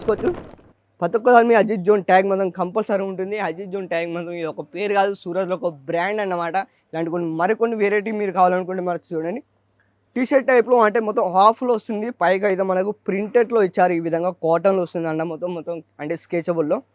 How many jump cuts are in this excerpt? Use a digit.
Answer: 0